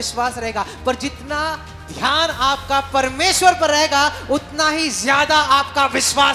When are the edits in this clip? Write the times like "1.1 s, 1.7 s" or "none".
none